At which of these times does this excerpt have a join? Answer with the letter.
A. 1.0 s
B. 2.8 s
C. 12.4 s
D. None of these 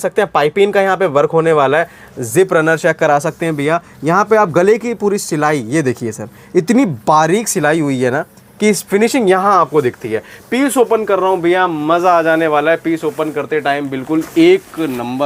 D